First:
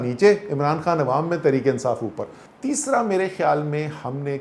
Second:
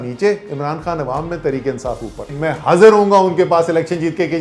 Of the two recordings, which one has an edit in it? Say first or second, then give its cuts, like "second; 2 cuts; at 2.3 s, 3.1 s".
second; 1 cut; at 2.3 s